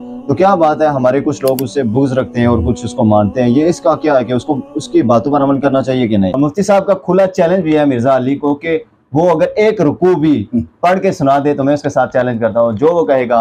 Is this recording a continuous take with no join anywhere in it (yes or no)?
yes